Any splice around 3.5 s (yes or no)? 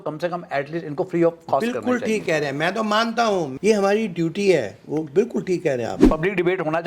yes